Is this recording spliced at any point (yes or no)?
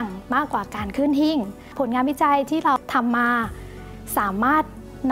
yes